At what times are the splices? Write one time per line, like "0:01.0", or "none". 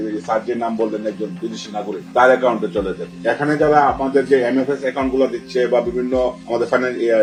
none